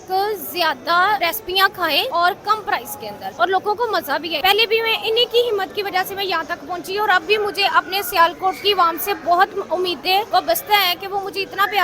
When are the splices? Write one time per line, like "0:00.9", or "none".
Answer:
0:01.5
0:03.2
0:04.3
0:10.3